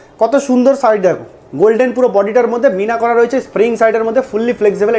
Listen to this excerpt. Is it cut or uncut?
uncut